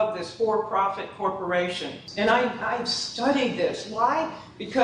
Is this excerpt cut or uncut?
cut